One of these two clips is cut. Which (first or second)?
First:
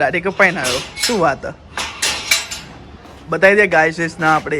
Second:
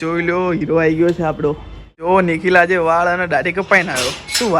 second